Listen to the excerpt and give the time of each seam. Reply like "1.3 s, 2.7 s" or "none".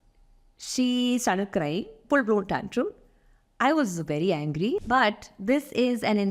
2.0 s, 4.8 s